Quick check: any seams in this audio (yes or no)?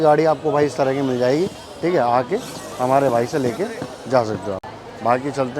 no